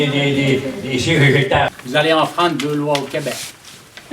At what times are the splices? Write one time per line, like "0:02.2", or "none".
0:01.7